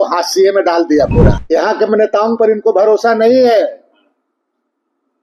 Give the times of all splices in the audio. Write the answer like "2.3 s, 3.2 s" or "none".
1.4 s